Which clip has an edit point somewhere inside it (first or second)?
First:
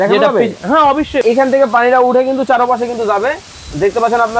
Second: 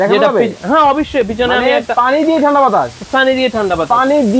first